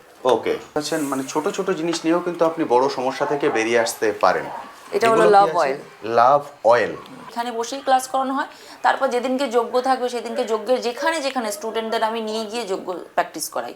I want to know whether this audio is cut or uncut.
cut